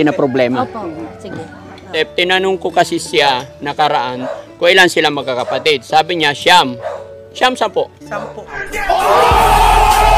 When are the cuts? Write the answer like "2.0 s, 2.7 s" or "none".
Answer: 1.9 s

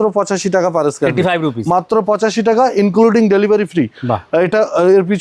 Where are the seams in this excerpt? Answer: none

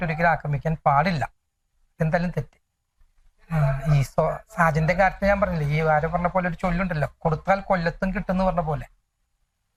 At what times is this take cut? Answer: none

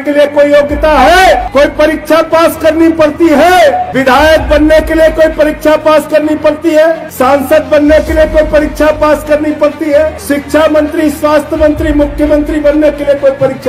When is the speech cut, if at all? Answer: 1.5 s, 3.9 s, 7.1 s, 10.2 s

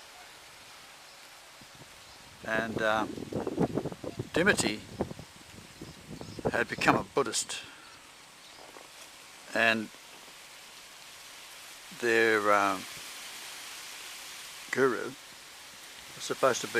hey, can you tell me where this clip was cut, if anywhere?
none

